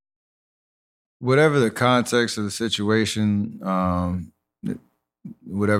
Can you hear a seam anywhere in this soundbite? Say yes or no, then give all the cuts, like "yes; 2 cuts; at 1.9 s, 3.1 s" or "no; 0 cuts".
no; 0 cuts